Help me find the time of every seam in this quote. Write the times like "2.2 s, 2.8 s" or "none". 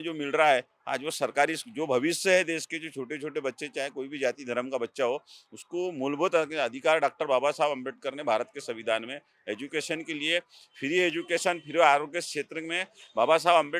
none

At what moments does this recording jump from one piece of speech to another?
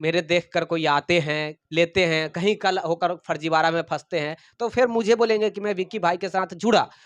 none

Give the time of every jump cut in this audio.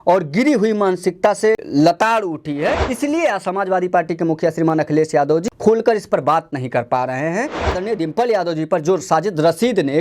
1.6 s, 2.9 s, 5.4 s, 7.7 s

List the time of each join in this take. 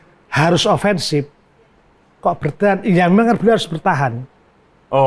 none

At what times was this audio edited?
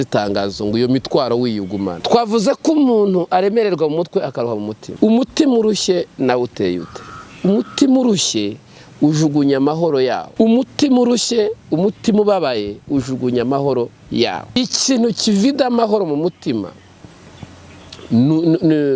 2.0 s, 4.8 s, 10.2 s, 14.6 s

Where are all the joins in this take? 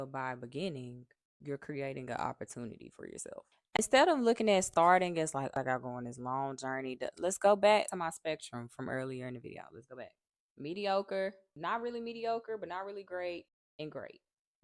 3.8 s

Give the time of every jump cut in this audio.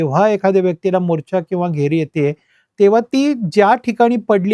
none

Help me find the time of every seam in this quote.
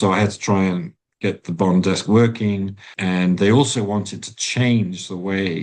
1.1 s, 2.9 s

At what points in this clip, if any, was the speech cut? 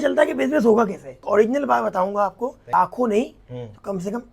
1.2 s, 2.7 s

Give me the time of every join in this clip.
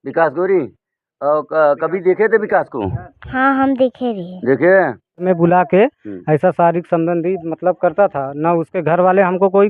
5.2 s

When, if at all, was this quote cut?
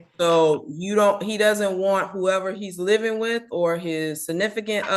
none

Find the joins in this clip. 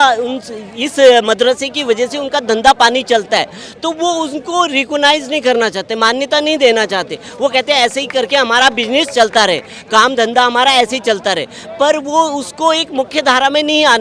none

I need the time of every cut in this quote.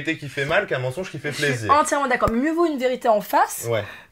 none

